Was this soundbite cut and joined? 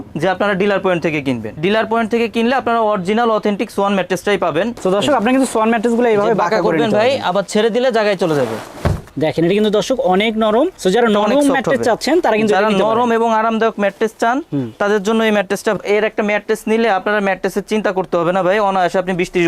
yes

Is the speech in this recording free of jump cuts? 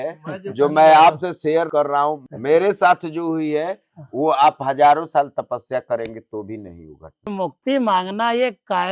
no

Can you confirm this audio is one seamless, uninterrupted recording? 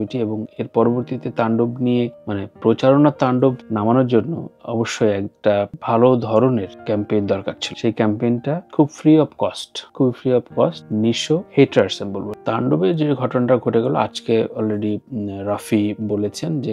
no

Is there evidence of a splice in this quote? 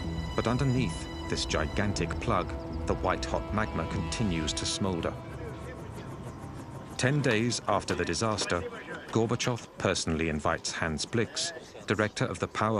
no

